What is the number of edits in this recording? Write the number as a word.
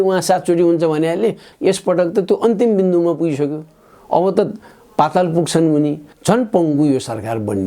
two